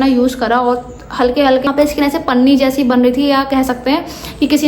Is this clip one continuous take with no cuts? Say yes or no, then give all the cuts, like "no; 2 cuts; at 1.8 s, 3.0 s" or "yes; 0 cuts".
no; 1 cut; at 1.7 s